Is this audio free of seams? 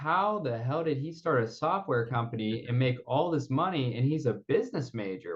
yes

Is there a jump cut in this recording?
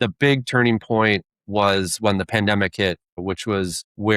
yes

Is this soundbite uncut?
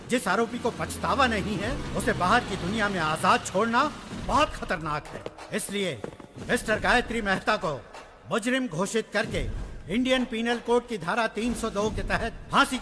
yes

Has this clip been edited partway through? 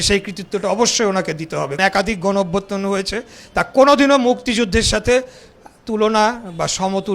yes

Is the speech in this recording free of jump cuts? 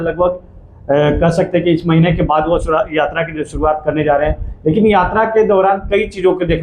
yes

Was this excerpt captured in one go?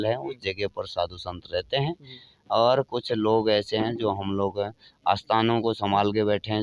yes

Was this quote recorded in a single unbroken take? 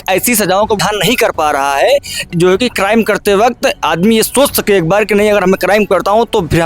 no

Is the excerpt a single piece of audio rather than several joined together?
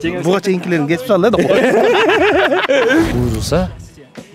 no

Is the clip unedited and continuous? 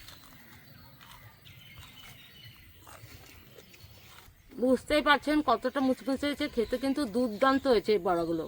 no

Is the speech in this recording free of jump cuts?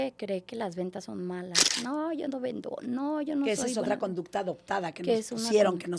yes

